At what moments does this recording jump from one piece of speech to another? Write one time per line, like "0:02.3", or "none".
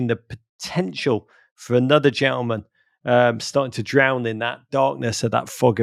none